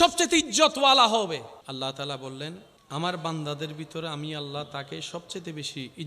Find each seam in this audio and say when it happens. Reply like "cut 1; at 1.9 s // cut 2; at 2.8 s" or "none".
cut 1; at 1.6 s // cut 2; at 2.7 s